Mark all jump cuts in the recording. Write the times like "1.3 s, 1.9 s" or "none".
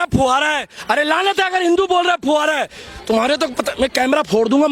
none